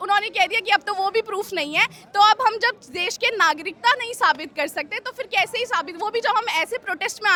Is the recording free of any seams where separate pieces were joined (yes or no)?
yes